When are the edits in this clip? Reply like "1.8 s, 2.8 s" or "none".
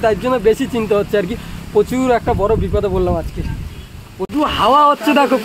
4.2 s